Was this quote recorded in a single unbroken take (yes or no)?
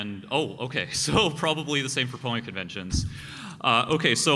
no